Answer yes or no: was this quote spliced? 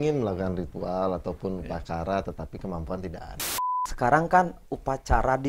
yes